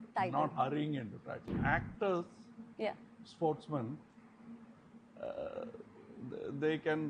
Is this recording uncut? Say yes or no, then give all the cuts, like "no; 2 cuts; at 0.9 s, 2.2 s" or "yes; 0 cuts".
no; 1 cut; at 1.4 s